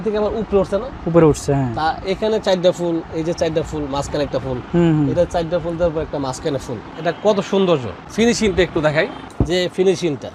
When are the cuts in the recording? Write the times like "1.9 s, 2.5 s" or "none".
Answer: none